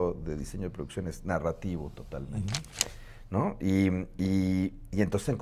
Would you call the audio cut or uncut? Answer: uncut